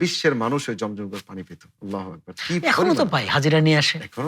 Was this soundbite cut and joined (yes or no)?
no